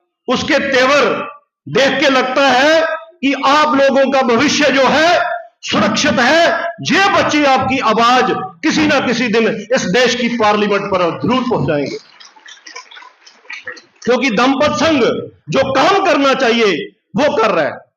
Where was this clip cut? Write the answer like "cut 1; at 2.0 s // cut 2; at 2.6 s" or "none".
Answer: none